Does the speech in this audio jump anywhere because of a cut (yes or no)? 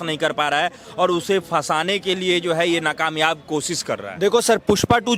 no